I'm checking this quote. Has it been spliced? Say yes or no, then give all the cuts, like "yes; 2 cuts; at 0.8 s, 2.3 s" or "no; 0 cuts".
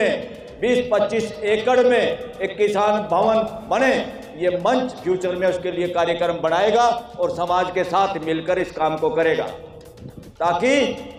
no; 0 cuts